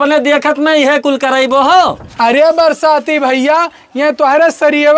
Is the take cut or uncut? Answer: cut